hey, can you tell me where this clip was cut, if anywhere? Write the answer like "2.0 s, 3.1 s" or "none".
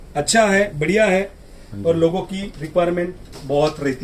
none